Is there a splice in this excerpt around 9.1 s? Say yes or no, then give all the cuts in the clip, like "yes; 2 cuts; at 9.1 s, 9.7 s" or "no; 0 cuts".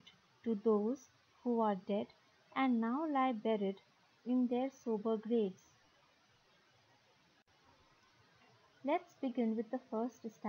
no; 1 cut; at 7.5 s